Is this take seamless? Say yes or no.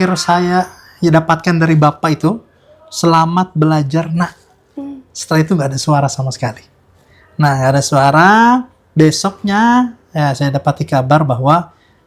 yes